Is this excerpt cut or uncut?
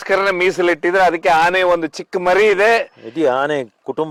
uncut